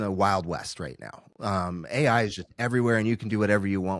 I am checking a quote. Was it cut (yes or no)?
no